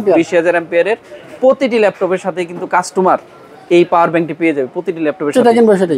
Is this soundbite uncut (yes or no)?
yes